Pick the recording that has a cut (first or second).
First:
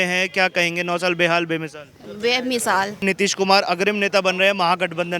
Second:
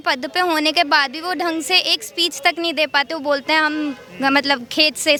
first